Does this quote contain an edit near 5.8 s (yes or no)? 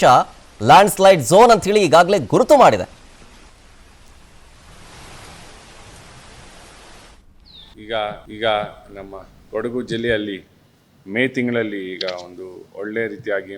yes